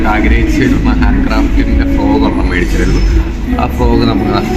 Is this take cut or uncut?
uncut